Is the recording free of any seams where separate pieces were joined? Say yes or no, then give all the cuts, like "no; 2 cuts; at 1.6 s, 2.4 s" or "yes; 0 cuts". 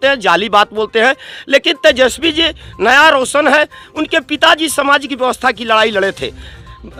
yes; 0 cuts